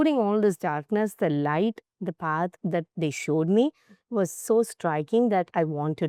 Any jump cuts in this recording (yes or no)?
no